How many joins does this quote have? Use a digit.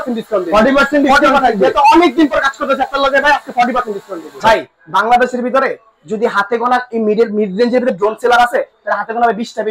1